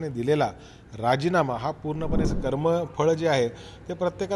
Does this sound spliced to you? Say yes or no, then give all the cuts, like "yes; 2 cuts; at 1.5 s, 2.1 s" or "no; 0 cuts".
yes; 1 cut; at 2.3 s